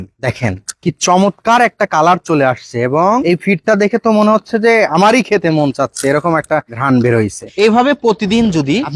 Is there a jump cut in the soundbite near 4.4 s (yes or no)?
no